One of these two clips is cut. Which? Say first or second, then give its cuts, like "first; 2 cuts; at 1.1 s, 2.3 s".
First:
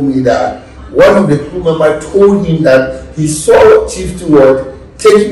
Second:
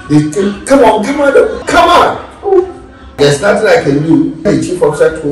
second; 3 cuts; at 1.6 s, 3.2 s, 4.5 s